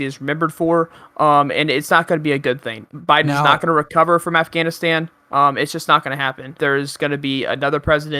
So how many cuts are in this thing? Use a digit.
1